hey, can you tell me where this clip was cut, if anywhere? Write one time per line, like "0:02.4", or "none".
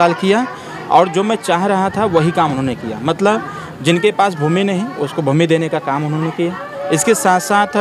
none